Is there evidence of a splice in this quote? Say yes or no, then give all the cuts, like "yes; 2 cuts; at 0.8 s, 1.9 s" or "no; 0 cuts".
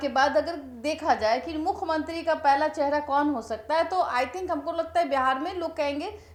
no; 0 cuts